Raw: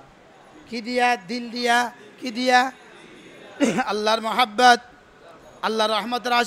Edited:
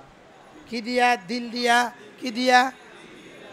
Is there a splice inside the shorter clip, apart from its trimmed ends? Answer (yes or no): no